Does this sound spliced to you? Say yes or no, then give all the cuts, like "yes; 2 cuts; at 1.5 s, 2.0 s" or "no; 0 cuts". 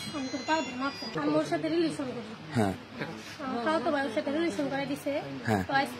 yes; 1 cut; at 1.1 s